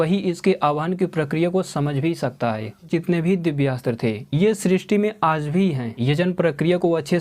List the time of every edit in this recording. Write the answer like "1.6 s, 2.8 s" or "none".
2.9 s, 5.9 s

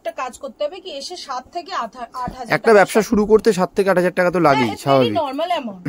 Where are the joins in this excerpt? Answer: none

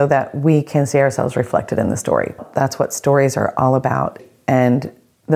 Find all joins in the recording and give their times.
2.4 s, 4.2 s

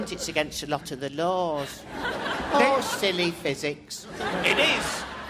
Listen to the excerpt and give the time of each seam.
1.7 s

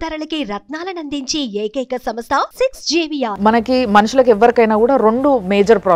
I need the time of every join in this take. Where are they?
3.3 s

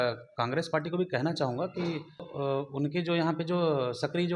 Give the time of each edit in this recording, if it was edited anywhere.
2.3 s

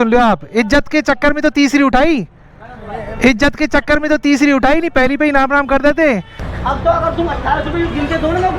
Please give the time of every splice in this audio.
6.4 s

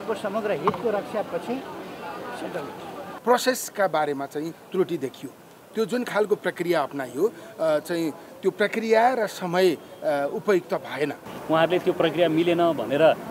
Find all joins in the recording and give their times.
3.1 s, 11.3 s

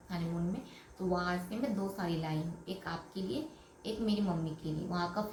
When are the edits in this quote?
none

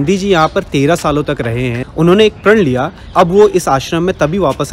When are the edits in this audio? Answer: 1.8 s, 3.0 s

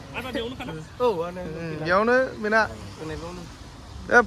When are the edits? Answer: none

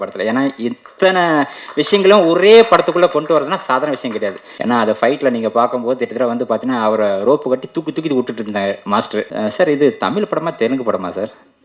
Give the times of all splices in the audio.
4.5 s, 9.3 s

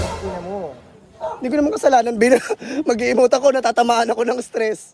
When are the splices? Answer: none

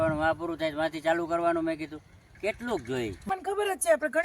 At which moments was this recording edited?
3.3 s

